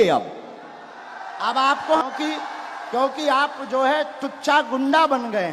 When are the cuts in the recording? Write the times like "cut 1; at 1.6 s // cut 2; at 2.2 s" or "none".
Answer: cut 1; at 2.0 s